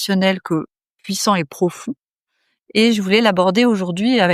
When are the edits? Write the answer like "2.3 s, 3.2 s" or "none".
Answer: none